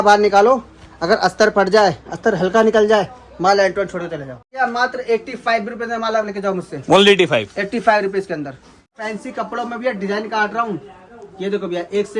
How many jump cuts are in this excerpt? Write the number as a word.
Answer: two